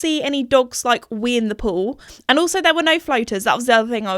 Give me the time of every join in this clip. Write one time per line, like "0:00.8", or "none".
0:02.1